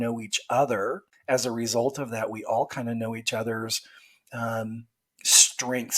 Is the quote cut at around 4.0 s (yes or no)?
no